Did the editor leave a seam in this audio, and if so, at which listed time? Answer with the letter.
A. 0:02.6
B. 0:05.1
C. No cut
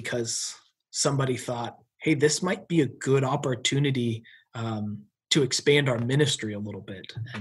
C